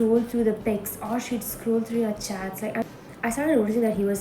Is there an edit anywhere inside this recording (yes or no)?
yes